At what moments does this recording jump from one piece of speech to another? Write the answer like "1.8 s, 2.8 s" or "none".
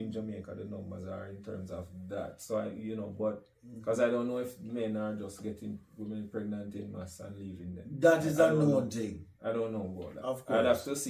none